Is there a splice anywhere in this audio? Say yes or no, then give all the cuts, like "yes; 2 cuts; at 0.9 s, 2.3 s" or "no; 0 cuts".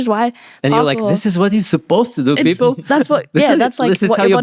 no; 0 cuts